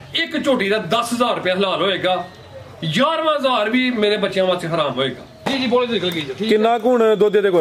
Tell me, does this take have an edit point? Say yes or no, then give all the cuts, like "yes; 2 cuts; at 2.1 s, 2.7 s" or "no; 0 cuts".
yes; 1 cut; at 5.4 s